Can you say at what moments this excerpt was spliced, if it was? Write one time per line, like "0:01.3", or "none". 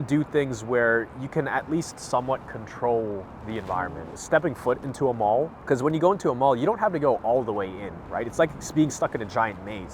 0:04.1